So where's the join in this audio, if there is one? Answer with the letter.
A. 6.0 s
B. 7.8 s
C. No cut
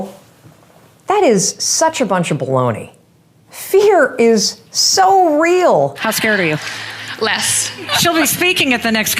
A